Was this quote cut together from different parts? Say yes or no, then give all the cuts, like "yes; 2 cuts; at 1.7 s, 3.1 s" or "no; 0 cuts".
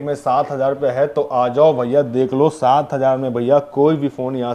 no; 0 cuts